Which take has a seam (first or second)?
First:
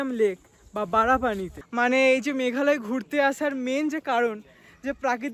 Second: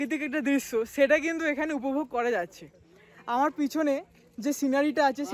first